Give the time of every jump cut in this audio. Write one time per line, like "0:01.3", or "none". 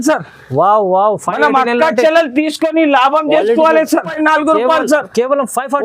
0:04.1